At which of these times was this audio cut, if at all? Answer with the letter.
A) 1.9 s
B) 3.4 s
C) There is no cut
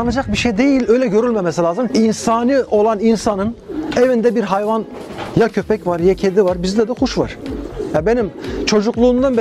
A